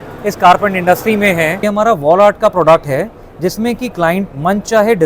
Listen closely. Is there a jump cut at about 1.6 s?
yes; 1 cut; at 1.6 s

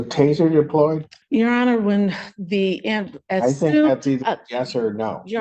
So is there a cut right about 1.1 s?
yes; 1 cut; at 1.1 s

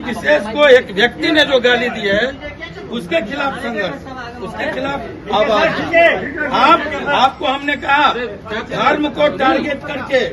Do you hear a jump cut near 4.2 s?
no; 0 cuts

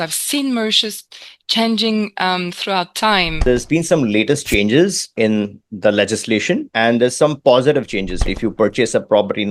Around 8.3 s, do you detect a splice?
yes; 2 cuts; at 3.4 s, 8.3 s

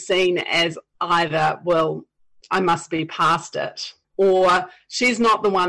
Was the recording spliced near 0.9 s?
no; 1 cut; at 4.0 s

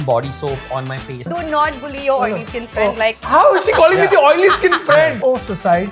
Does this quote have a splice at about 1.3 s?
yes; 3 cuts; at 1.3 s, 3.2 s, 5.2 s

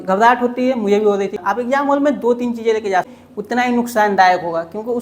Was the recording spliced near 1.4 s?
yes; 2 cuts; at 1.4 s, 3.2 s

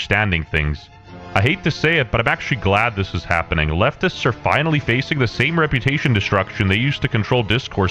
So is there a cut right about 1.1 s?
no; 2 cuts; at 2.4 s, 5.2 s

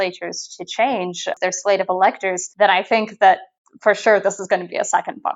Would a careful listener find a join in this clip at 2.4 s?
yes; 2 cuts; at 1.3 s, 2.4 s

